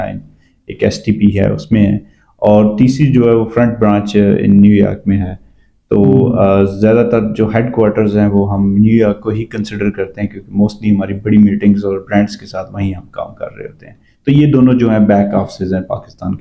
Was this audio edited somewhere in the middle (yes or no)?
no